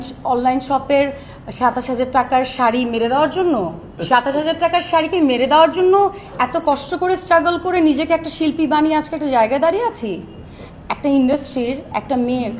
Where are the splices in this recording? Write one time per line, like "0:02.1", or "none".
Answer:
0:03.9

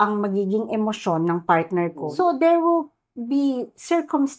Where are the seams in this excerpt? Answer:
0:02.1

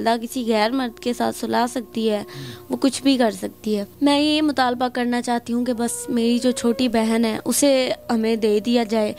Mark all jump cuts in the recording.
0:03.9

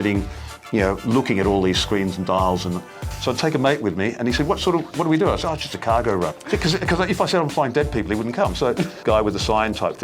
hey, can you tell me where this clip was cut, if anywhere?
0:03.1
0:06.4
0:09.0

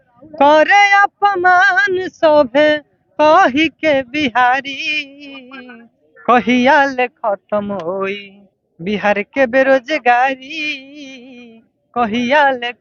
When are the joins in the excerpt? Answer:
none

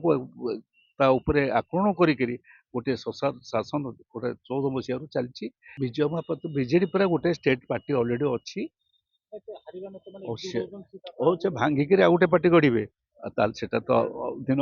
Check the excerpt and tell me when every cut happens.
0:05.6

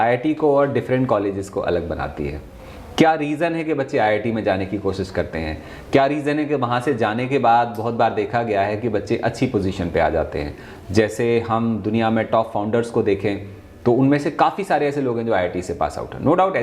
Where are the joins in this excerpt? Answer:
none

